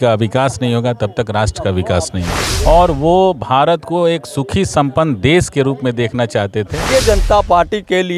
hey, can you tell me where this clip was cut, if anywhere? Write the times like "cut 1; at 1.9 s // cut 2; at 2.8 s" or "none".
cut 1; at 2.3 s // cut 2; at 6.8 s